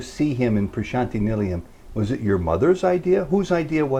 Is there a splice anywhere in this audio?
no; 0 cuts

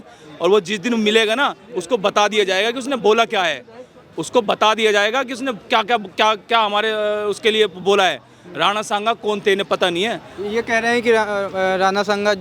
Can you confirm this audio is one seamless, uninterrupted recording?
yes; 0 cuts

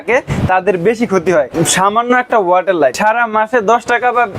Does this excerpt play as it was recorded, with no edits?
no; 2 cuts; at 1.5 s, 2.9 s

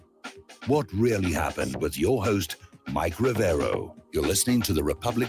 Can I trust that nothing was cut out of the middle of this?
no; 1 cut; at 4.0 s

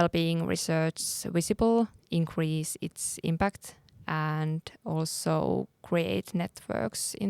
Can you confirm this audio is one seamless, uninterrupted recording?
no; 1 cut; at 2.0 s

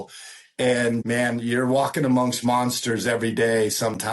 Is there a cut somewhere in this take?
yes; 1 cut; at 1.0 s

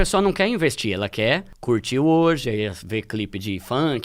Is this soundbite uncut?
no; 1 cut; at 1.5 s

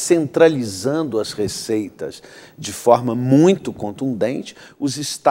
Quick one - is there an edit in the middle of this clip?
no; 0 cuts

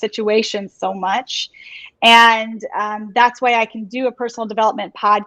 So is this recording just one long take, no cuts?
yes; 0 cuts

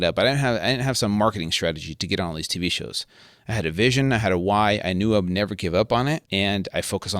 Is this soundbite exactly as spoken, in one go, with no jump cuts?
no; 1 cut; at 6.2 s

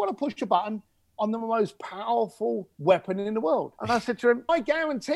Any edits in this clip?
yes; 2 cuts; at 2.7 s, 4.3 s

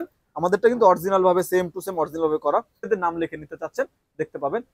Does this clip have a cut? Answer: yes; 1 cut; at 2.9 s

